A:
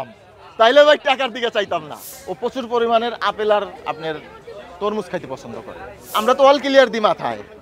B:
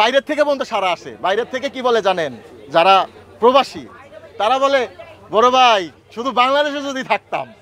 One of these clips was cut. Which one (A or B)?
A